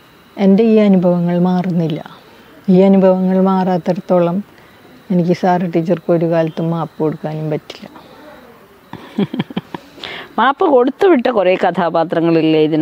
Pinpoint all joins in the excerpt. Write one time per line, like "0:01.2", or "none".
none